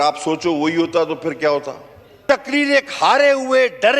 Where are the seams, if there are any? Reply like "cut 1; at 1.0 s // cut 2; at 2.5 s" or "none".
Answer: cut 1; at 2.2 s

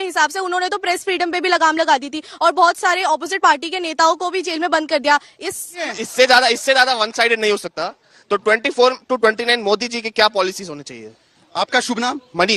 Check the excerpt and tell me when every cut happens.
cut 1; at 5.8 s

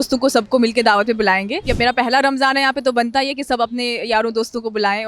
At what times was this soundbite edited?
cut 1; at 1.6 s

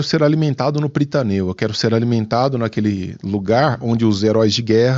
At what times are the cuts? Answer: none

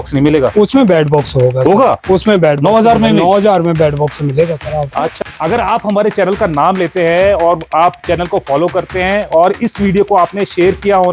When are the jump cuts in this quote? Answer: cut 1; at 5.1 s

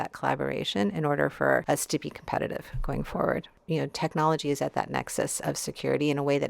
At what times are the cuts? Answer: cut 1; at 1.6 s // cut 2; at 3.5 s

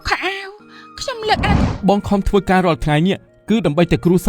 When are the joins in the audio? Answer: cut 1; at 1.7 s

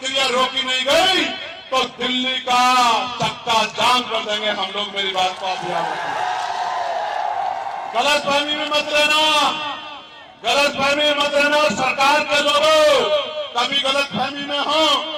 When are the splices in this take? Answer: none

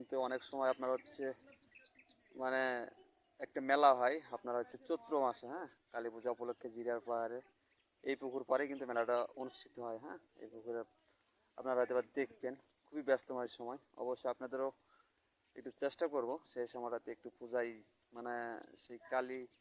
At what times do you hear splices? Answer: none

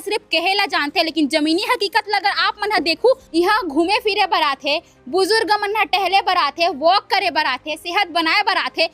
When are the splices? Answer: cut 1; at 3.2 s

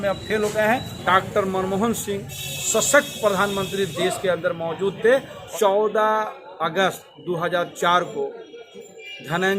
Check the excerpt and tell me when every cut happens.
cut 1; at 0.9 s // cut 2; at 5.4 s

